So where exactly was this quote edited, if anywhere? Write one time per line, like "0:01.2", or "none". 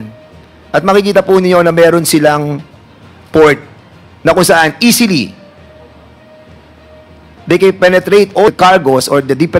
0:08.5